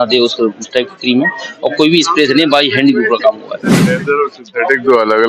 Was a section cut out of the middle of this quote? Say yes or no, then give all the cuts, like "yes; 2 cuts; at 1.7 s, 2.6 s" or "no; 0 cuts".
yes; 1 cut; at 3.9 s